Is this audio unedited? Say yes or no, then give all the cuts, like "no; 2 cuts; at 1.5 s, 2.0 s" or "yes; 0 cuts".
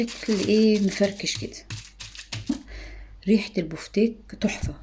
no; 1 cut; at 2.5 s